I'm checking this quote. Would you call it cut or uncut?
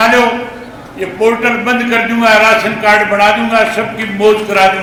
uncut